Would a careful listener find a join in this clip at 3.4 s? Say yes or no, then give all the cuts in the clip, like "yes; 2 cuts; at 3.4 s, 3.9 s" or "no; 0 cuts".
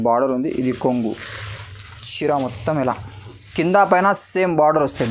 yes; 1 cut; at 3.4 s